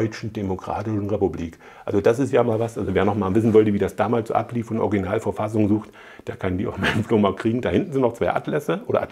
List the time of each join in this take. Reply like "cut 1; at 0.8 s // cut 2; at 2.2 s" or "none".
none